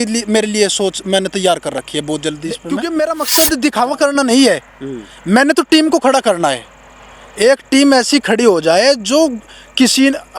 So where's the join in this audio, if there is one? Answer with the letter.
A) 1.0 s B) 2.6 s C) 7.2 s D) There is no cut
B